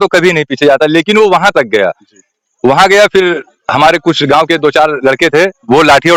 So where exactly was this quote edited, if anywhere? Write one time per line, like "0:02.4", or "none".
none